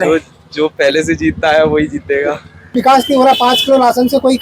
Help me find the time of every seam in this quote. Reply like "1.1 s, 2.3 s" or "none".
2.7 s

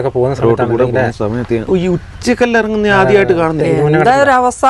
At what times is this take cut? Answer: 1.6 s, 3.6 s

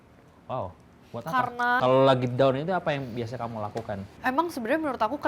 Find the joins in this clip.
1.8 s, 4.1 s

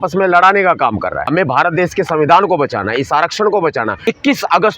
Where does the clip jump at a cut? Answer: 1.3 s, 4.0 s

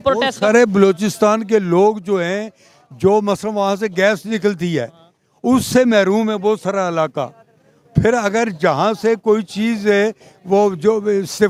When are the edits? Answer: none

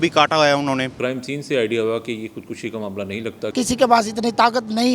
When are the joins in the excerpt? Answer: 1.0 s, 3.5 s

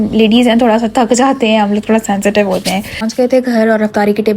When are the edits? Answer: 3.0 s

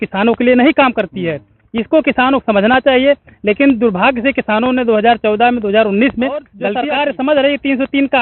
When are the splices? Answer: 6.6 s

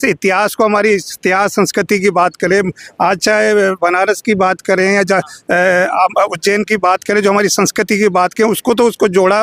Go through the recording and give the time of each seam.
none

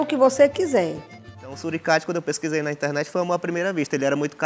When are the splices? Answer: 1.5 s

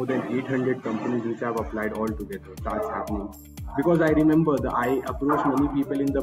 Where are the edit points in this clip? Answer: 2.5 s

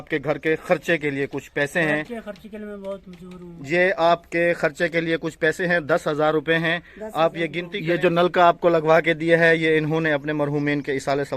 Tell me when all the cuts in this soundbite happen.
7.7 s

